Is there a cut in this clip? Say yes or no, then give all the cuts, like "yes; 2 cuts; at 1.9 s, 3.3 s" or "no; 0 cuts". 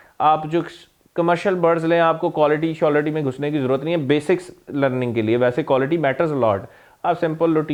no; 0 cuts